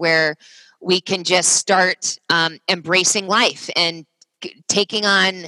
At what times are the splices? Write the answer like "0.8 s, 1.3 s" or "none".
none